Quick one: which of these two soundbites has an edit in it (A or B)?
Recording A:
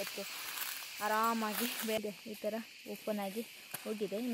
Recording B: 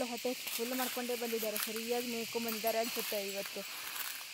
A